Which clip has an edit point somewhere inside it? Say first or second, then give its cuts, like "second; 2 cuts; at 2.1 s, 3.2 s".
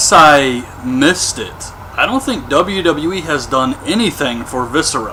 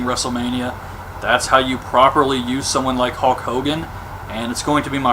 second; 1 cut; at 2.9 s